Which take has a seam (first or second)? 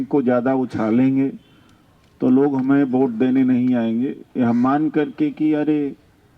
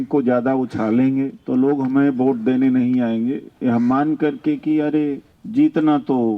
second